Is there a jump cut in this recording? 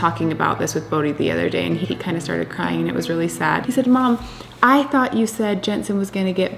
yes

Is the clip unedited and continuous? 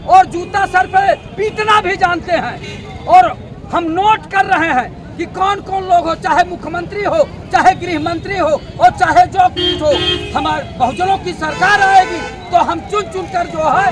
yes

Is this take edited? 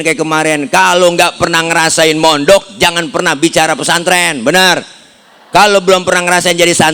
no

